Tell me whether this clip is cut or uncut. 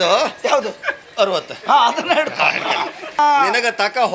cut